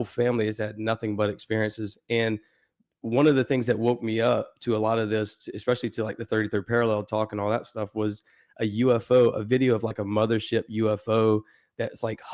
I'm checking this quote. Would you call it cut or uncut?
uncut